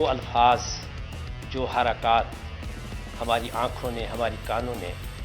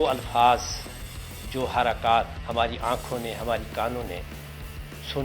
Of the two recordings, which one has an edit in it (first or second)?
second